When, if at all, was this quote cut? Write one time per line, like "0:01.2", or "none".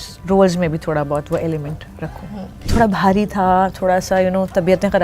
0:02.7